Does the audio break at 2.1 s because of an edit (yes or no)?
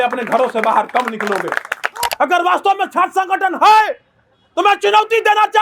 yes